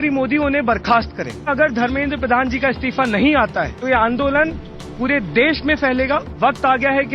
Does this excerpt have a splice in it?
yes; 3 cuts; at 1.5 s, 3.7 s, 6.3 s

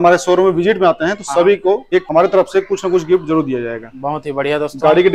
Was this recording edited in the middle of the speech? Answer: yes; 1 cut; at 2.0 s

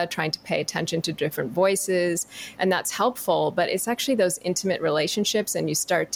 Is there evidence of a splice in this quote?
no; 0 cuts

